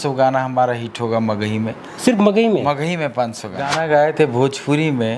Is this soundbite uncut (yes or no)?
no